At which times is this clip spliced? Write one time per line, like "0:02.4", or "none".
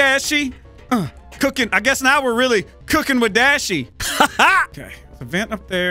0:04.0
0:04.8

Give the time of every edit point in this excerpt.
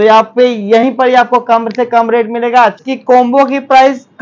0:02.8

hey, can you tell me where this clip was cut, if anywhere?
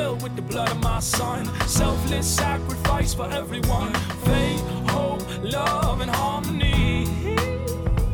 none

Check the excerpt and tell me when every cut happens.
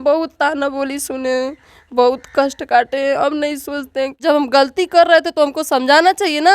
0:04.1

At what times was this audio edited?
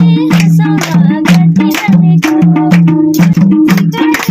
0:03.3

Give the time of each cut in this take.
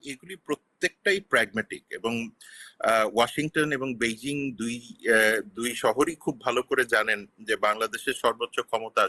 none

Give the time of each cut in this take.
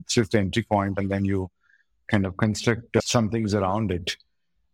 0:03.0

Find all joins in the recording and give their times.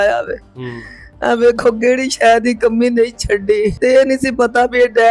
0:03.8

